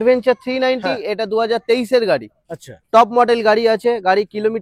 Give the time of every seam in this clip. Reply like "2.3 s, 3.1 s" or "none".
none